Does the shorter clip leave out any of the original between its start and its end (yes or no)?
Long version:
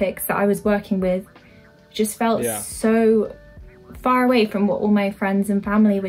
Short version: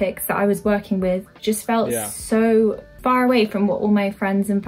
yes